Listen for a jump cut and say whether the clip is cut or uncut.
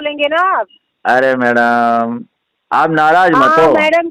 uncut